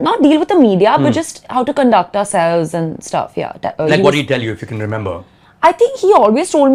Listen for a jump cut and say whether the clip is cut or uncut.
uncut